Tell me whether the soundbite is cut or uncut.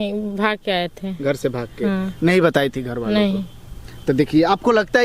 uncut